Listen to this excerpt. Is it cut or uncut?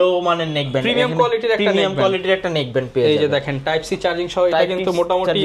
uncut